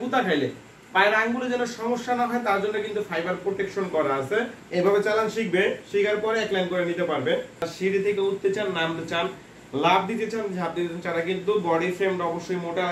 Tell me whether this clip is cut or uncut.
cut